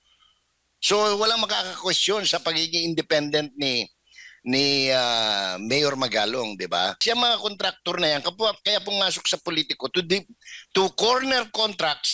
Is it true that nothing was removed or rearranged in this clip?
no; 1 cut; at 7.0 s

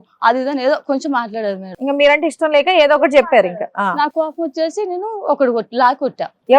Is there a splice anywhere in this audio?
no; 0 cuts

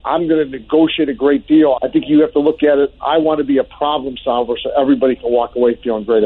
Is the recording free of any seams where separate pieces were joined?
no; 1 cut; at 1.8 s

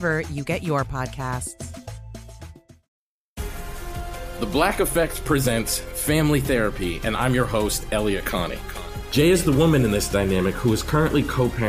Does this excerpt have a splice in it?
yes; 1 cut; at 3.0 s

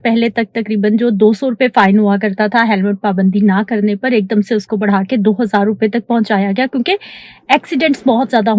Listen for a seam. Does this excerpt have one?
no; 0 cuts

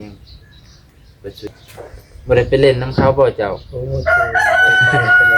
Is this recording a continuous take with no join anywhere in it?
no; 1 cut; at 1.5 s

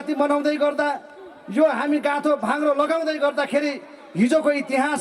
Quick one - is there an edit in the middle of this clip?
no; 0 cuts

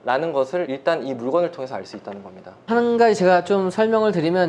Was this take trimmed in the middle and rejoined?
no; 0 cuts

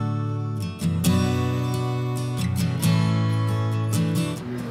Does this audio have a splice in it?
no; 0 cuts

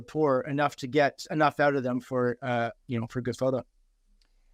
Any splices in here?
no; 0 cuts

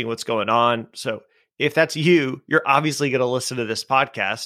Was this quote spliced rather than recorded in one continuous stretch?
no; 0 cuts

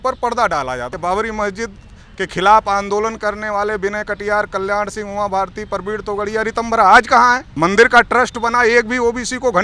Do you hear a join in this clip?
yes; 2 cuts; at 0.9 s, 7.5 s

